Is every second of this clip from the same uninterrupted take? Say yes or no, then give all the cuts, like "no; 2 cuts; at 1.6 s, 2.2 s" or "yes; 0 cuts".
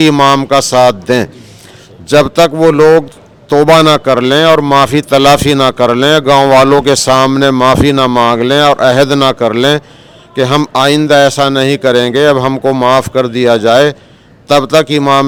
yes; 0 cuts